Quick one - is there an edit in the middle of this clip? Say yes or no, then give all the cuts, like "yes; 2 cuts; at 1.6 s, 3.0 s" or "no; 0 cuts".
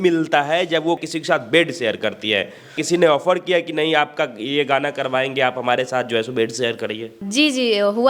yes; 3 cuts; at 1.0 s, 2.8 s, 7.2 s